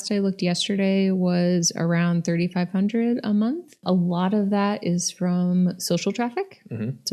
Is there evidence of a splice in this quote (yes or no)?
yes